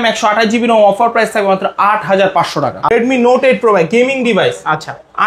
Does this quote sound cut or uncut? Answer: cut